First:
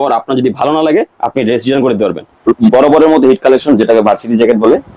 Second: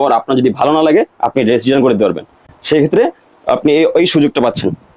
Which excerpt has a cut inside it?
first; 1 cut; at 2.4 s

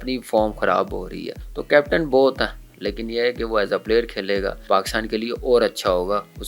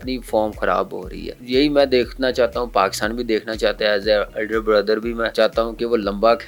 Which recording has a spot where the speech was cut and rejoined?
first; 2 cuts; at 1.4 s, 4.6 s

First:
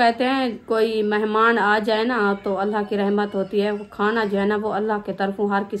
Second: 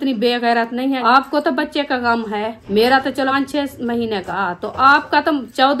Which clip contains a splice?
second; 4 cuts; at 1.0 s, 2.6 s, 3.3 s, 4.3 s

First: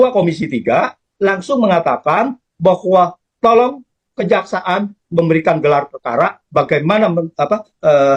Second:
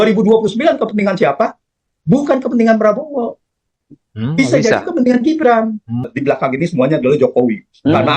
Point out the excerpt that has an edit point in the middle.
second; 1 cut; at 6.1 s

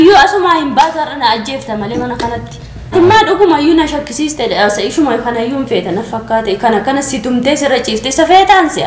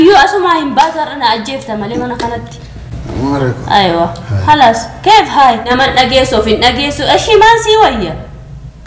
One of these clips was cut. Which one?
first; 1 cut; at 2.9 s

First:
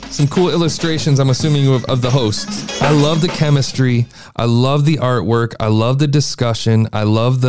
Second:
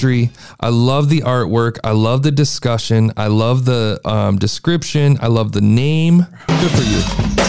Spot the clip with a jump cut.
first; 1 cut; at 2.7 s

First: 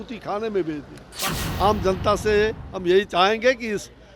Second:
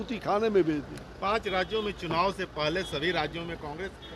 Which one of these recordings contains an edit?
first; 1 cut; at 1.3 s

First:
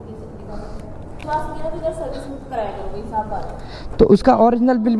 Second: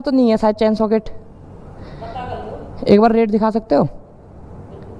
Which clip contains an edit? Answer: first; 1 cut; at 1.2 s

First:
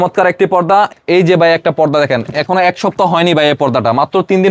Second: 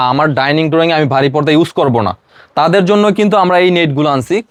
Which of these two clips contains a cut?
first; 1 cut; at 0.9 s

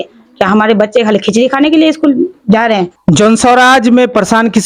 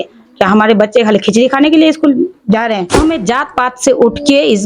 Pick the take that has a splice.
second; 1 cut; at 3.0 s

